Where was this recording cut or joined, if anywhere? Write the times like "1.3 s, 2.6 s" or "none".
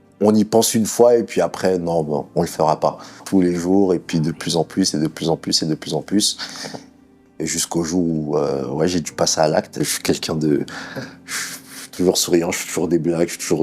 3.2 s, 9.7 s